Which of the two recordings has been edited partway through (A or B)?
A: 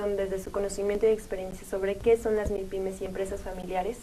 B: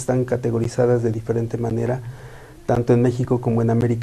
B